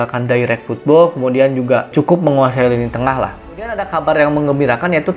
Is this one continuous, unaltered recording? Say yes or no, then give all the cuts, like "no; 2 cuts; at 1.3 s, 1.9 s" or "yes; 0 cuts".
no; 2 cuts; at 1.9 s, 3.5 s